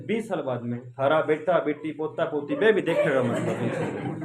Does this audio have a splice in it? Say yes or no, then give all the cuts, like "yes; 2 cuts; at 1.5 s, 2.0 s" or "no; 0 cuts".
no; 0 cuts